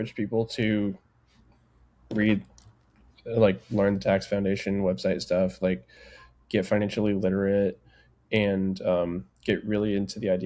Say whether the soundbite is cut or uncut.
uncut